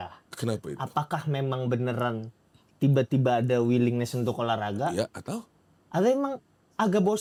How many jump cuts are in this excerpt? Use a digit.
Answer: 0